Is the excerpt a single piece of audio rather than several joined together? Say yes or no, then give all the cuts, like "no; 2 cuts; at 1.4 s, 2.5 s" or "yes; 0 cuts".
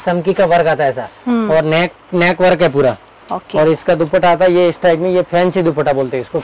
yes; 0 cuts